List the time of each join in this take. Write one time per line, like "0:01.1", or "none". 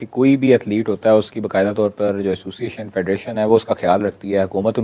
none